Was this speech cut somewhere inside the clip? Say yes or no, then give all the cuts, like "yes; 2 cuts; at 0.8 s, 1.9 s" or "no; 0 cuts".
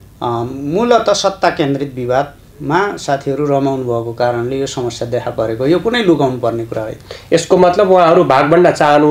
no; 0 cuts